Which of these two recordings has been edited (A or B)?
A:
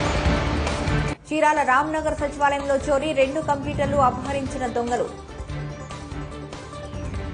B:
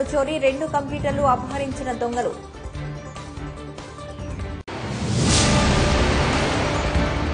A